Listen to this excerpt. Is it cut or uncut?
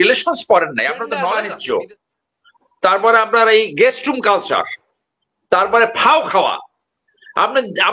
cut